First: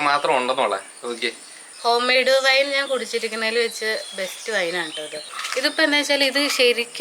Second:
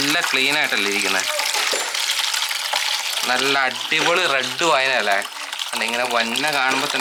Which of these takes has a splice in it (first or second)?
first